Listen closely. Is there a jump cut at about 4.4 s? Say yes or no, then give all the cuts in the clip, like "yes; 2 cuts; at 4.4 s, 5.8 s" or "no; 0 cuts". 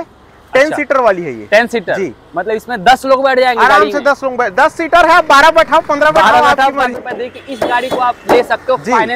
no; 1 cut; at 6.9 s